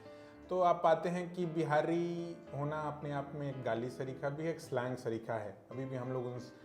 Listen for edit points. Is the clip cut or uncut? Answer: uncut